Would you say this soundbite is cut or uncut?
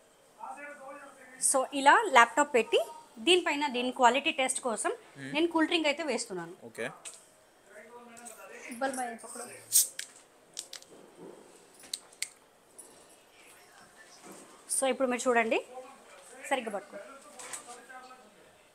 uncut